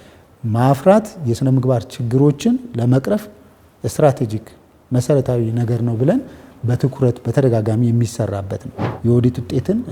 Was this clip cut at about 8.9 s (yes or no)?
yes